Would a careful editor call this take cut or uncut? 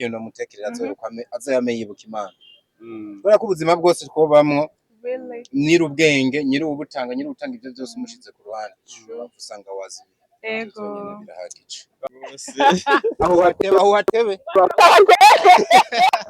cut